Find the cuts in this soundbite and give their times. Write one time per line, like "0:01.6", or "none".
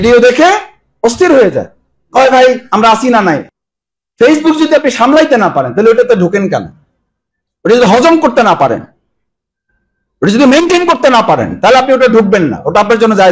0:03.5